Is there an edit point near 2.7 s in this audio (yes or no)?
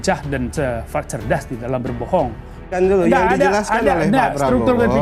yes